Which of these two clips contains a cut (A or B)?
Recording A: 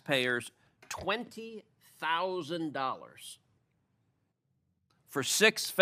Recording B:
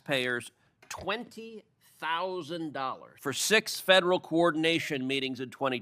B